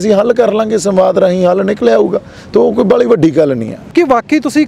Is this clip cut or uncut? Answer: uncut